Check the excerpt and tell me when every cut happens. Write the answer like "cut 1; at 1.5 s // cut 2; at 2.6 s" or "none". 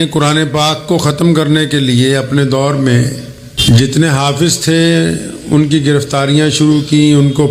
cut 1; at 3.5 s